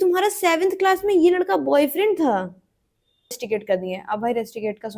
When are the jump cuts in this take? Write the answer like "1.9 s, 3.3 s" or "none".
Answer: 3.4 s